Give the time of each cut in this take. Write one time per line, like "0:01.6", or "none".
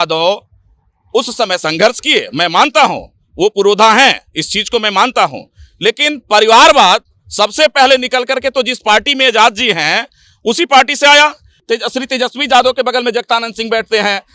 0:11.5